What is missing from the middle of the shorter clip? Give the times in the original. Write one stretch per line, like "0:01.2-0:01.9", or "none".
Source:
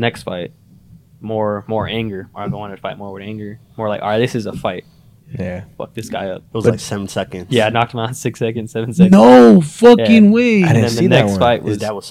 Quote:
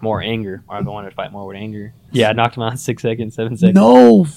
0:03.7-0:07.4